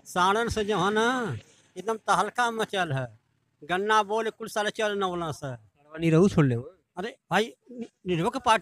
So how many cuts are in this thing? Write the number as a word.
zero